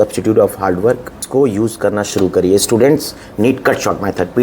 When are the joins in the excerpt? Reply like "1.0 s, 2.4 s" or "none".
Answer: 1.2 s